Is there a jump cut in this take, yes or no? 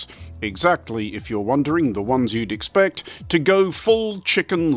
no